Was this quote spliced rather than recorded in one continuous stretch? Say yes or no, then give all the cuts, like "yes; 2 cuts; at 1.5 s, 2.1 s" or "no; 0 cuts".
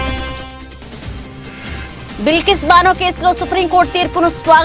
no; 0 cuts